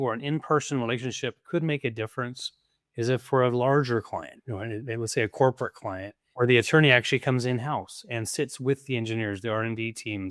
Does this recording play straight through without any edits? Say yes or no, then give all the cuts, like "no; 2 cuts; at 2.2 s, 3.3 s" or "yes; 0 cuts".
no; 2 cuts; at 1.4 s, 6.3 s